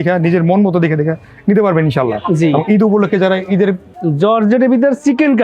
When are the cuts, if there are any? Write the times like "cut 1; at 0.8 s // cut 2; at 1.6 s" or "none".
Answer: cut 1; at 3.9 s